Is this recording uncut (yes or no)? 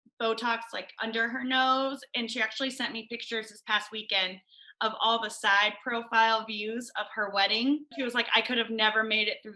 no